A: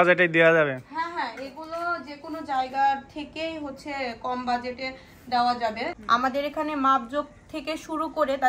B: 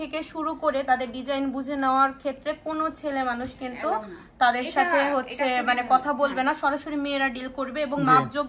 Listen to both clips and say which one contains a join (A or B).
A